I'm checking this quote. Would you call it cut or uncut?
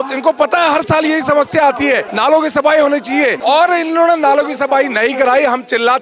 cut